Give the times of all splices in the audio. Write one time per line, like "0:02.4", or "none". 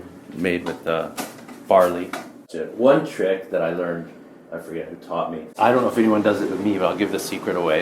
0:02.4
0:05.5